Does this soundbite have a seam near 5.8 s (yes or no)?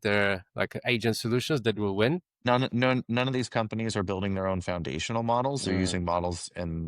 no